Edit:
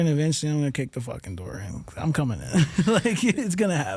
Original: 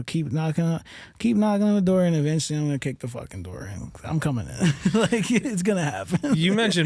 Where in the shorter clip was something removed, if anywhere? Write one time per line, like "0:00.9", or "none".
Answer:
none